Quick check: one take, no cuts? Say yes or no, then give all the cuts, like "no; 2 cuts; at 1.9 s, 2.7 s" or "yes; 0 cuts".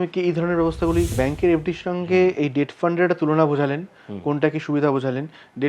no; 1 cut; at 1.1 s